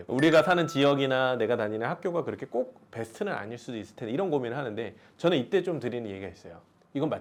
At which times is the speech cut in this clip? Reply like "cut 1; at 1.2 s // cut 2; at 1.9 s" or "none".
none

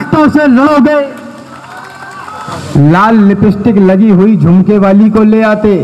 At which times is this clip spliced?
cut 1; at 2.5 s

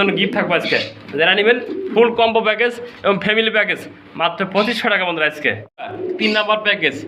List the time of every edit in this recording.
none

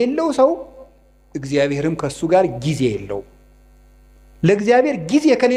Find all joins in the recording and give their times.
none

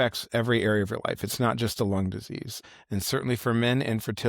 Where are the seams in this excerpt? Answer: cut 1; at 2.6 s

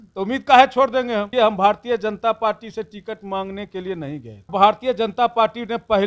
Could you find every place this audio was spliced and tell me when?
cut 1; at 1.3 s // cut 2; at 4.5 s

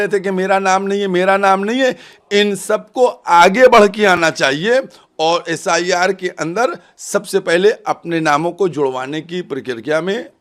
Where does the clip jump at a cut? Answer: none

